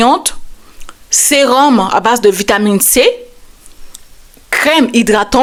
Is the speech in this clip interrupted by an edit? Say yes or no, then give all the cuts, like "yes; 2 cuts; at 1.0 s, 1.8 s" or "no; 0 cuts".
no; 0 cuts